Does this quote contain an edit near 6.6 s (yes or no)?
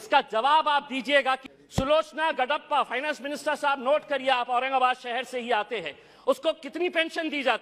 no